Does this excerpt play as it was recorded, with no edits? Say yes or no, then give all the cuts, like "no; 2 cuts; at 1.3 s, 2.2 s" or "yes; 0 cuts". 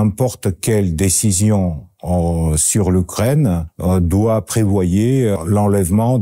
no; 2 cuts; at 3.7 s, 5.4 s